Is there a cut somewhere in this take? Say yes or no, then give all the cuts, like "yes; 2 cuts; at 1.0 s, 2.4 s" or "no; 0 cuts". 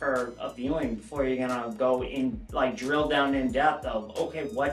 no; 0 cuts